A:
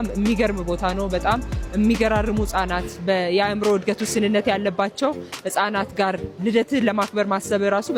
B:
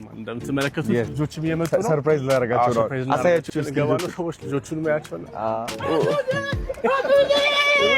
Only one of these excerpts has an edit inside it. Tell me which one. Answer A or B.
B